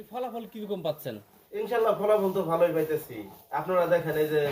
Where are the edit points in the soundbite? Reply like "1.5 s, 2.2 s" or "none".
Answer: none